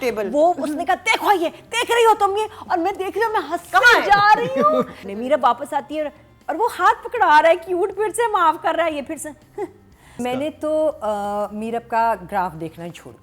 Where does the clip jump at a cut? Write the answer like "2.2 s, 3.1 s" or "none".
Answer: 5.0 s, 10.2 s